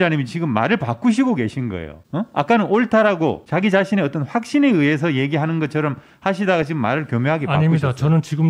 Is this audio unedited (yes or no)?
yes